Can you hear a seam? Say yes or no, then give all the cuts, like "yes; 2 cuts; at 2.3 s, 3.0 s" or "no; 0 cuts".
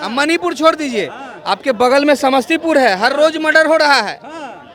no; 0 cuts